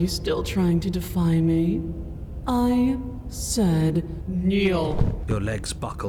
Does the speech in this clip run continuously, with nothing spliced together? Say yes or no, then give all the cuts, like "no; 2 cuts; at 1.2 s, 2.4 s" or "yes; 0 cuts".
yes; 0 cuts